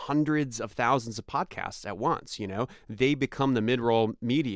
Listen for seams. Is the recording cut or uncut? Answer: uncut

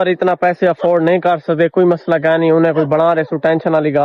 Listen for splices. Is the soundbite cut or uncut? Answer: uncut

